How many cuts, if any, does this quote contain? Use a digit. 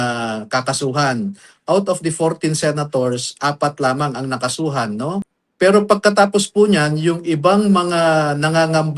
1